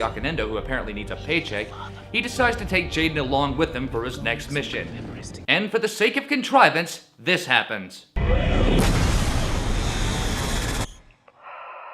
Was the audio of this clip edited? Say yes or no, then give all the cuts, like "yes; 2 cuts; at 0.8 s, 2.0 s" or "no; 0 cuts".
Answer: yes; 1 cut; at 6.3 s